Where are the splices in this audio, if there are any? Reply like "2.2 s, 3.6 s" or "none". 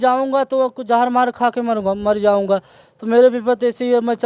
none